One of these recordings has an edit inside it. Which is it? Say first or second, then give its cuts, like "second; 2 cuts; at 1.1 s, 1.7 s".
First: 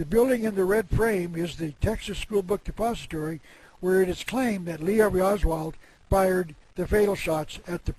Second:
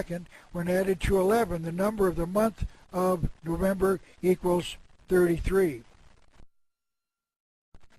second; 1 cut; at 3.3 s